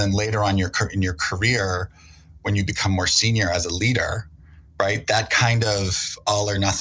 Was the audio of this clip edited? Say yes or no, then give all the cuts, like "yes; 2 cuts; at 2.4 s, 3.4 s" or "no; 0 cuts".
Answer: no; 0 cuts